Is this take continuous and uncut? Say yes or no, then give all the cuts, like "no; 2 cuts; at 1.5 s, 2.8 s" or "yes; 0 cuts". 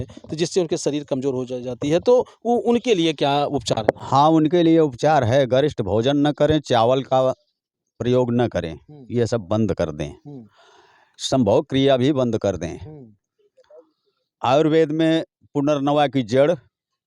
yes; 0 cuts